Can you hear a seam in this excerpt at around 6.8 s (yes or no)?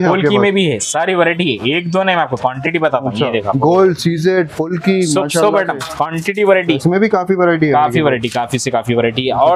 yes